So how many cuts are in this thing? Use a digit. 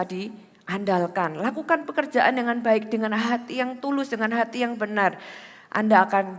0